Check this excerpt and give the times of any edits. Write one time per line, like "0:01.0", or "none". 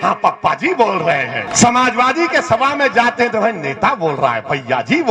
0:01.4

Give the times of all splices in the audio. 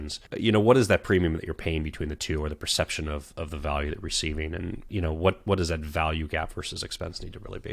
0:04.8

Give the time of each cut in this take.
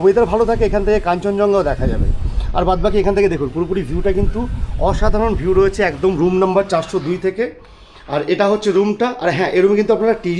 none

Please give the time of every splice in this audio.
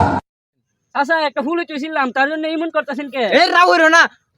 0:00.9

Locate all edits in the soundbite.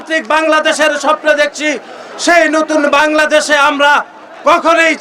none

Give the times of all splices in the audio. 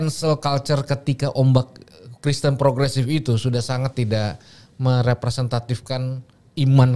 none

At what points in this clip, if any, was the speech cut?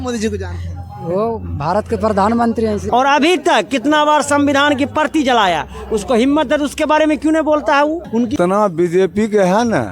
0:02.8
0:08.3

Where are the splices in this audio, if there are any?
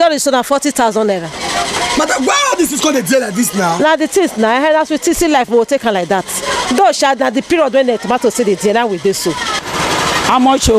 0:09.6

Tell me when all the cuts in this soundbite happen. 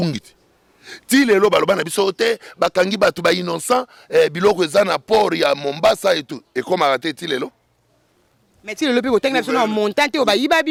none

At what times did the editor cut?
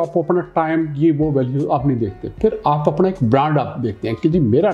none

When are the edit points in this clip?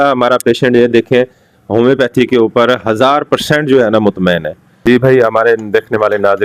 0:04.8

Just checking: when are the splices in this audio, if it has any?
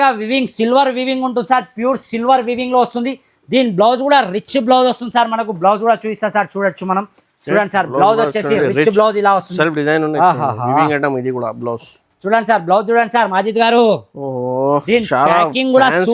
0:12.0

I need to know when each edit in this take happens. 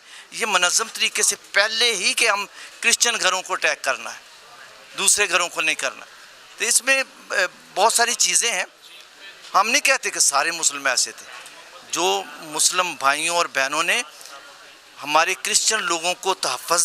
none

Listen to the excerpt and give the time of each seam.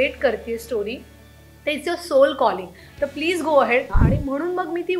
0:04.0

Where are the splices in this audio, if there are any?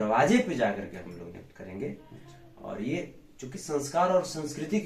none

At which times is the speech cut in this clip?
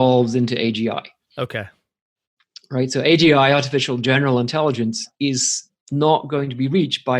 none

